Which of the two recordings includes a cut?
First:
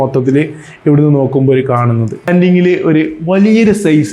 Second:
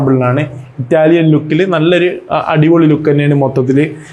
first; 1 cut; at 2.2 s

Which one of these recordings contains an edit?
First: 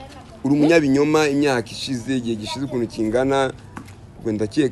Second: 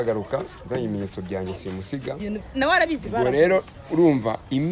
second; 1 cut; at 2.2 s

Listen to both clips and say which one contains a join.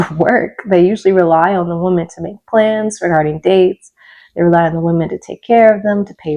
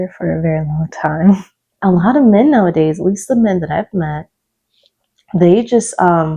second; 1 cut; at 1.6 s

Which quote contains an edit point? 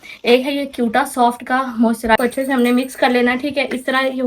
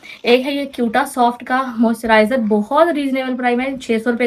first; 1 cut; at 2.2 s

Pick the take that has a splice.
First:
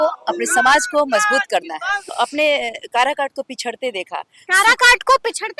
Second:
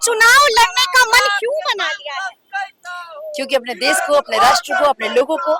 first; 1 cut; at 2.1 s

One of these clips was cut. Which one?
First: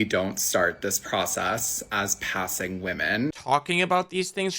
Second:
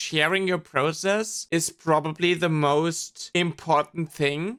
first; 1 cut; at 3.3 s

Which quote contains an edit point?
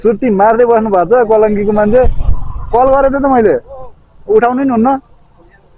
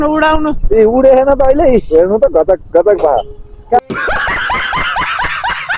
second; 1 cut; at 3.9 s

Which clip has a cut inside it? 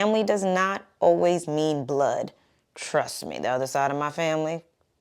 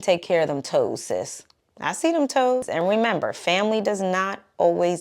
second; 1 cut; at 2.7 s

